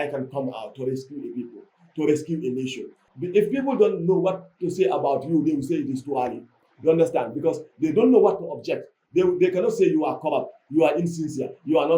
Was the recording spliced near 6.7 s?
no; 1 cut; at 3.0 s

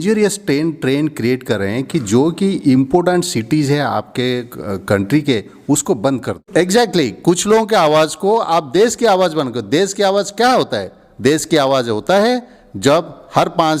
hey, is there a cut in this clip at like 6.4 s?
yes; 1 cut; at 6.4 s

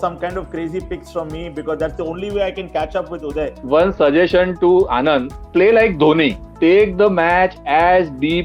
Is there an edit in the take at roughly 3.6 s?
yes; 3 cuts; at 3.6 s, 5.4 s, 6.4 s

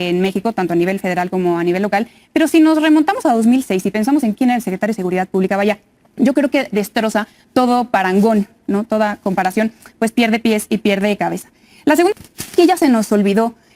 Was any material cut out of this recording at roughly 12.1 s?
yes; 1 cut; at 12.1 s

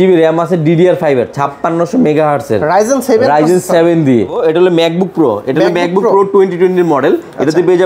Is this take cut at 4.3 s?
yes; 1 cut; at 4.3 s

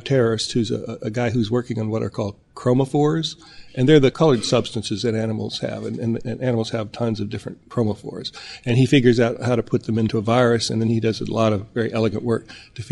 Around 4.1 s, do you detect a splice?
yes; 3 cuts; at 4.1 s, 7.6 s, 10.1 s

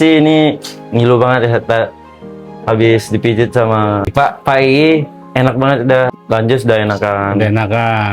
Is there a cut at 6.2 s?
yes; 2 cuts; at 4.1 s, 6.2 s

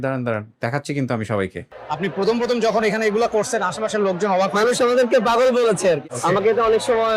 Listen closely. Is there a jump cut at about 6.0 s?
yes; 2 cuts; at 1.7 s, 6.0 s

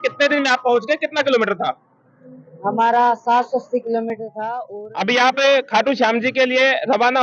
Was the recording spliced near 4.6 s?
yes; 1 cut; at 4.6 s

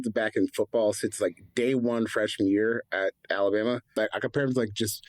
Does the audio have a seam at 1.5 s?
no; 1 cut; at 3.9 s

